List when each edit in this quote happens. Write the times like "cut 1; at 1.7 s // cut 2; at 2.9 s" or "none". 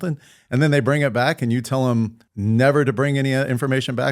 cut 1; at 2.3 s